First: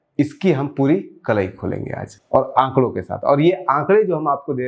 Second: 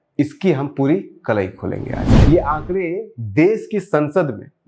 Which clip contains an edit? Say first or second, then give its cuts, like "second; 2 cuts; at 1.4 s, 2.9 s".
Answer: second; 1 cut; at 2.1 s